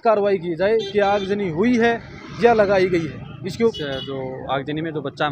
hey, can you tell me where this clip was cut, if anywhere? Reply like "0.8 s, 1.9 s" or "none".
3.8 s

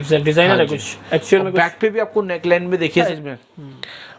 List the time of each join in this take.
3.0 s

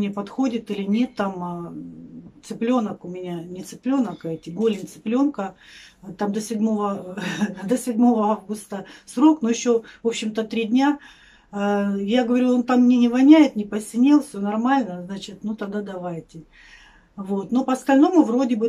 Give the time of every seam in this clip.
none

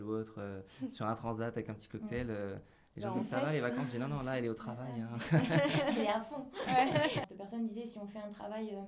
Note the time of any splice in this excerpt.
7.2 s

